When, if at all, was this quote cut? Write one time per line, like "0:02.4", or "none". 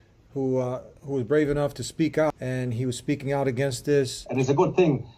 0:02.3
0:04.2